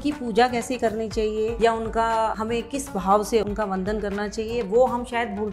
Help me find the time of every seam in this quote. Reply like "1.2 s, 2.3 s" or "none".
1.5 s, 2.4 s, 3.4 s

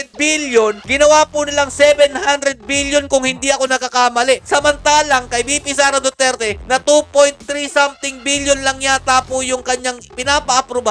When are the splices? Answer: none

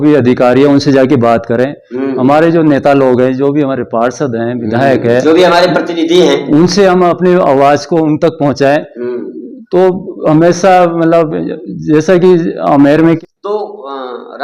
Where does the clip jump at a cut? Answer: 13.2 s

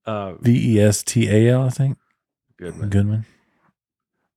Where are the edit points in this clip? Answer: none

